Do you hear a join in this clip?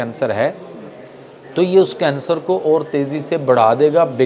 no; 0 cuts

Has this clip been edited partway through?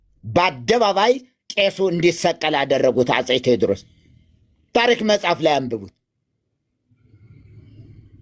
no; 0 cuts

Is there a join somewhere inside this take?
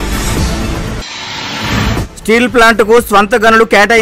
yes; 1 cut; at 1.0 s

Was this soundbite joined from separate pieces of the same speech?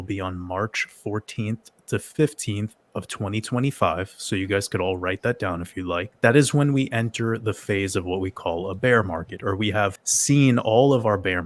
yes; 2 cuts; at 6.1 s, 10.1 s

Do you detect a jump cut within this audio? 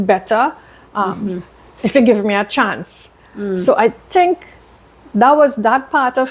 no; 0 cuts

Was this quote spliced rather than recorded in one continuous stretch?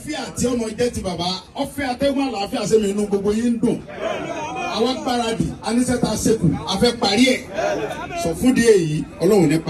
no; 0 cuts

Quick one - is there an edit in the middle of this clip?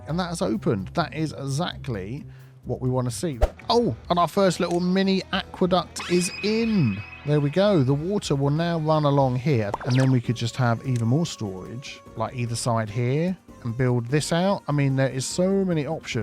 yes; 2 cuts; at 3.3 s, 9.7 s

